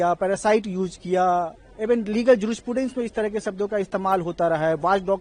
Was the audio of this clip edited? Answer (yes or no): no